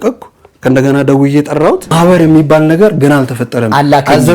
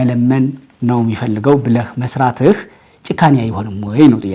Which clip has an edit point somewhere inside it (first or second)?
first